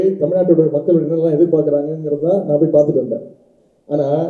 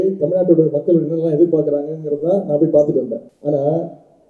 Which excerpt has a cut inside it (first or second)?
second